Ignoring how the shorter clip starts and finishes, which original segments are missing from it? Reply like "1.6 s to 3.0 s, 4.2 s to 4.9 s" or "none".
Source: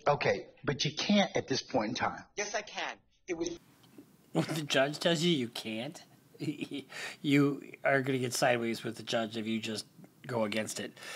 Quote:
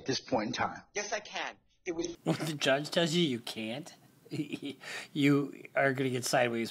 3.6 s to 4.3 s

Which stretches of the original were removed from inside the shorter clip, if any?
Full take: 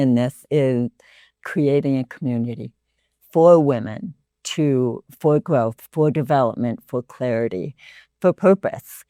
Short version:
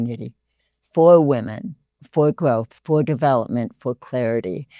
4.4 s to 5.1 s

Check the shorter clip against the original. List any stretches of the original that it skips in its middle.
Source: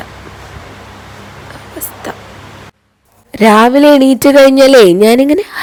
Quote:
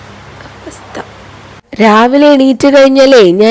2.6 s to 3.1 s

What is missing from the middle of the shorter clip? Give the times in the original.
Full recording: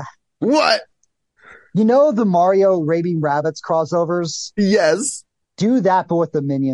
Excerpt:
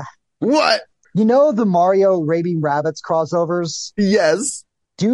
1.0 s to 1.6 s

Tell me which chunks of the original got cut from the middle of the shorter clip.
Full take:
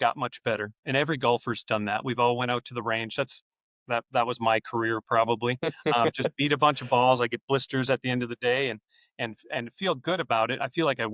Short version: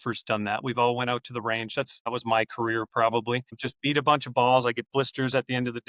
3.5 s to 4.2 s, 5.8 s to 6.2 s

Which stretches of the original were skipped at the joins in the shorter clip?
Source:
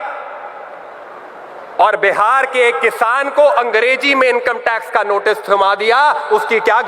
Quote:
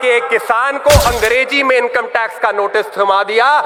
none

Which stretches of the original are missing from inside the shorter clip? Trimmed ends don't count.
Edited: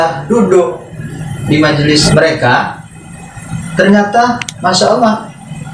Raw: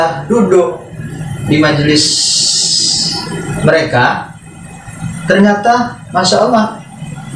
2.0 s to 3.5 s

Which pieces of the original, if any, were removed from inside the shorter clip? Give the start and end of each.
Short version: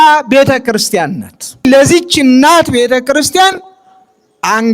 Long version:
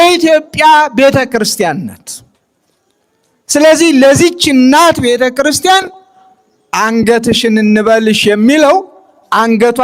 2.3 s to 3.9 s

